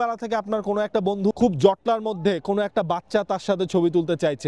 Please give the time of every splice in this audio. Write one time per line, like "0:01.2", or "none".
0:01.3

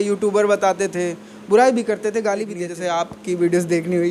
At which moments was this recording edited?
0:02.6

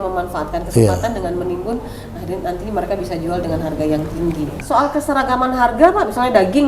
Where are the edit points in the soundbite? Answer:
0:04.6

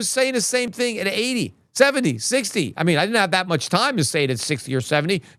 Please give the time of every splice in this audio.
none

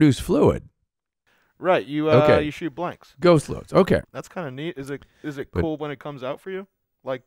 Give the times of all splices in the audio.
0:04.0

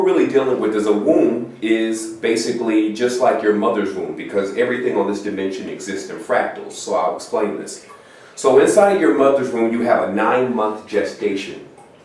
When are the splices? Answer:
none

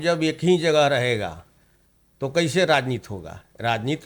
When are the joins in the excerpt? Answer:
none

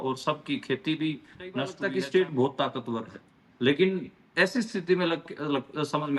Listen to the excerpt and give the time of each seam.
0:01.8

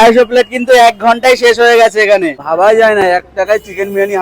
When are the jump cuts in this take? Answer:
0:02.4

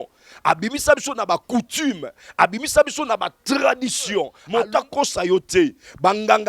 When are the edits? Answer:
0:04.4

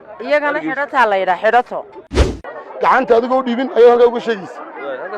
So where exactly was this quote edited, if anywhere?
0:02.5

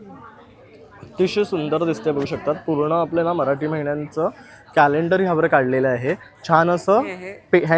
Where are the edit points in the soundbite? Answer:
none

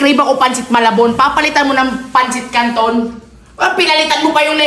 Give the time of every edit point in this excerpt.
none

